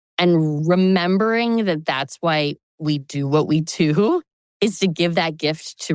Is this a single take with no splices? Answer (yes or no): no